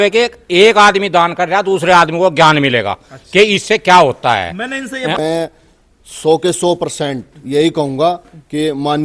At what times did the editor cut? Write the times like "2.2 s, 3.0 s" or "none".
5.2 s

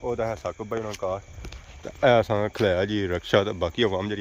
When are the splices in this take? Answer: none

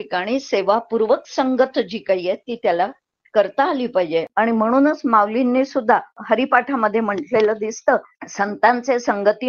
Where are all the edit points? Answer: 4.3 s, 6.2 s, 8.2 s

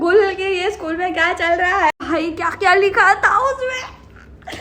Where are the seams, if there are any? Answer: 1.9 s

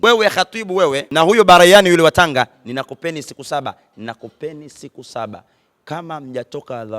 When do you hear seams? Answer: 1.0 s

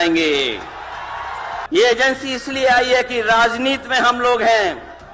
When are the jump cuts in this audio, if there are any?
1.6 s

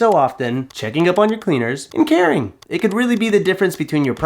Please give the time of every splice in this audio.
1.8 s, 2.6 s

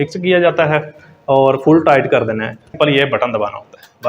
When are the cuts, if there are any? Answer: 2.7 s

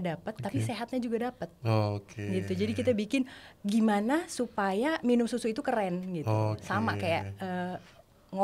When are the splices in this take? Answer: none

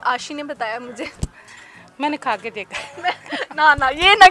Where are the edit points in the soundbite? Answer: 2.6 s

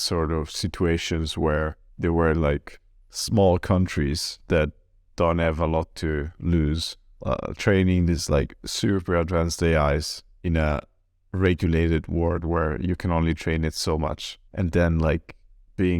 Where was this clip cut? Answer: 7.1 s

